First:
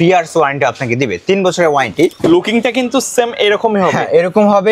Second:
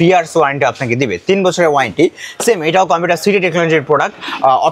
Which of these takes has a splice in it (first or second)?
first